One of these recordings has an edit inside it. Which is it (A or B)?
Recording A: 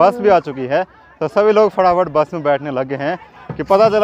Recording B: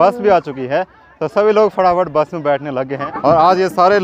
B